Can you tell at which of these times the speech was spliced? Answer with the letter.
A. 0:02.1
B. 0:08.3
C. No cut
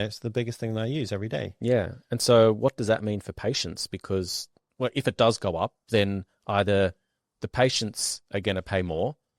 C